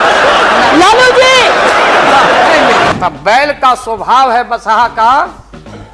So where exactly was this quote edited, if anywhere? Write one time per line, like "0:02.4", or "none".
0:02.9